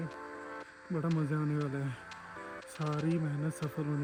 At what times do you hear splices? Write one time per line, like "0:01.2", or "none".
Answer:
none